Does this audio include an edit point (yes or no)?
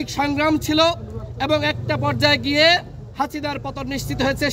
no